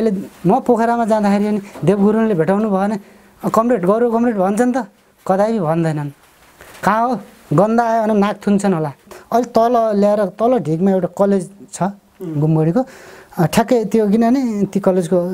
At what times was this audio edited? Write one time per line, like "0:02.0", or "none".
0:09.0